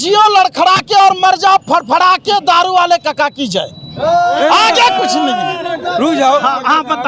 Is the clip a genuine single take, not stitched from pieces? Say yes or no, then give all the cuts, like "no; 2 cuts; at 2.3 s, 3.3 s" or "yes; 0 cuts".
yes; 0 cuts